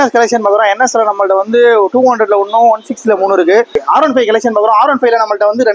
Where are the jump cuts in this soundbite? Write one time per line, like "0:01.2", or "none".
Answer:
0:03.8